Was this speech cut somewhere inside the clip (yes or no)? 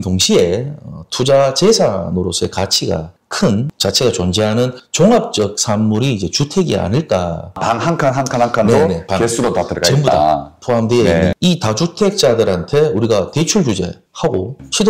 yes